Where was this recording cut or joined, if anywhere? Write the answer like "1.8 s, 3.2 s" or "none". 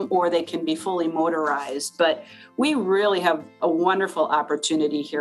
none